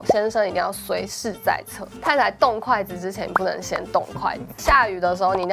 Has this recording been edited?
yes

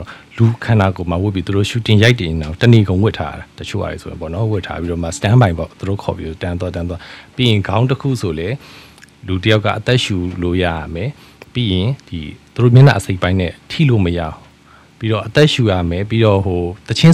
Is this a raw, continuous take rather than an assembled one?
yes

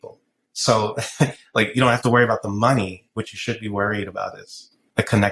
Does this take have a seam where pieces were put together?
no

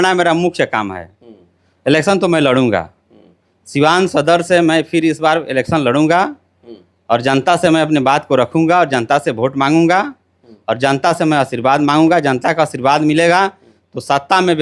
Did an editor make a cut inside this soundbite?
no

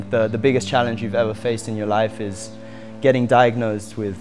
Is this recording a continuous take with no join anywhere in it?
yes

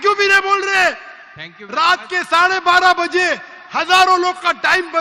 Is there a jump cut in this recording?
no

